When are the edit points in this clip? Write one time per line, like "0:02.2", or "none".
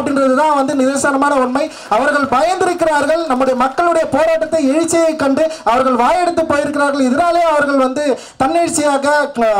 none